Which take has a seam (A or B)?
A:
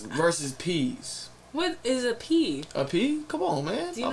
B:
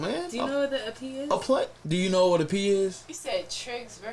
B